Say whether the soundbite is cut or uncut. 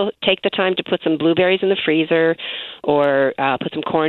uncut